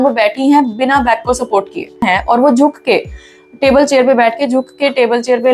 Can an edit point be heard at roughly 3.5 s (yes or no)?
no